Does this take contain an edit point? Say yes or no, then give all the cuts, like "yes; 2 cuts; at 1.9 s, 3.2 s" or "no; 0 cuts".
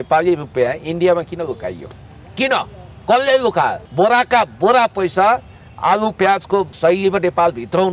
yes; 2 cuts; at 3.8 s, 6.8 s